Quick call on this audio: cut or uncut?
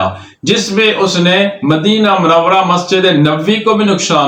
uncut